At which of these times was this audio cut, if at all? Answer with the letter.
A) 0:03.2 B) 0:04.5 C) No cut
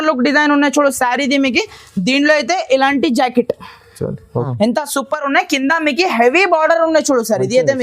B